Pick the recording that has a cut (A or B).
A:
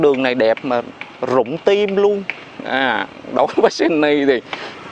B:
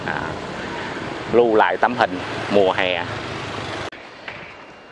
B